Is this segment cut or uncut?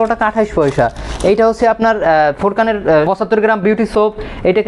uncut